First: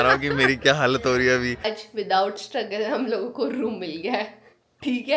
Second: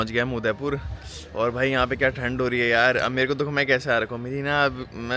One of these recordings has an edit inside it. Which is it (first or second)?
first